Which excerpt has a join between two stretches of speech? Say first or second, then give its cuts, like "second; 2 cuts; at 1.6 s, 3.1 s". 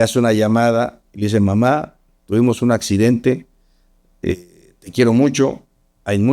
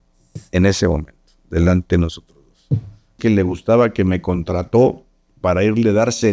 second; 1 cut; at 3.2 s